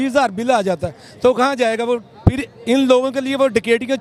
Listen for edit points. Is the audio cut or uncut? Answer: uncut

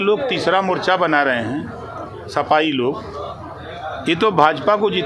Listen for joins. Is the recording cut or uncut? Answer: uncut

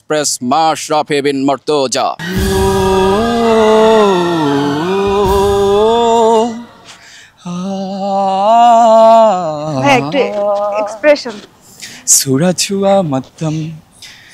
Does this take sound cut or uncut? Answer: cut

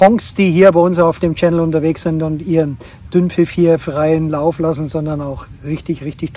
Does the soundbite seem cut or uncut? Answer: uncut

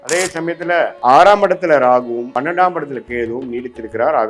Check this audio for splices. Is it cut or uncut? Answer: cut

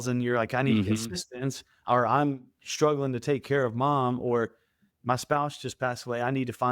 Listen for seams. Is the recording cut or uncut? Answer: uncut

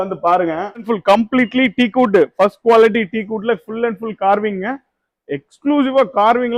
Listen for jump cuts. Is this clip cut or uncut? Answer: cut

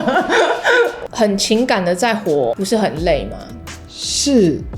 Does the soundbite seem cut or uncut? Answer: cut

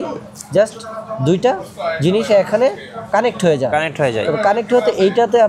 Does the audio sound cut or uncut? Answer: uncut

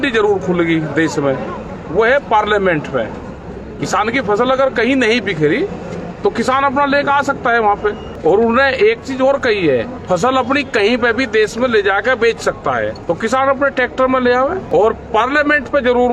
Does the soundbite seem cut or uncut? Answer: cut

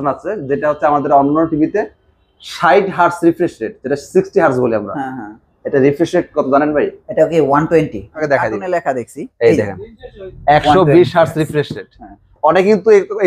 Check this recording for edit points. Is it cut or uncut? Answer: cut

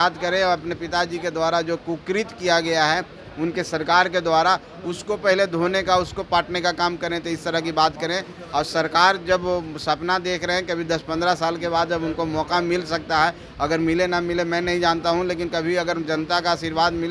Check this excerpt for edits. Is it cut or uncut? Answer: uncut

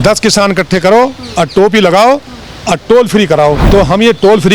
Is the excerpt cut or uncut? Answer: cut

